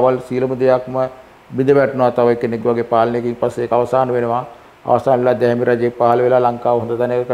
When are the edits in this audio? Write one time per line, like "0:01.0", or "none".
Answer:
none